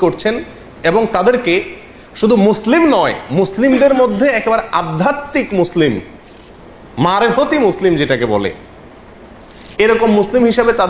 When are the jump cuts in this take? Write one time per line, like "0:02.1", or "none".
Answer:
none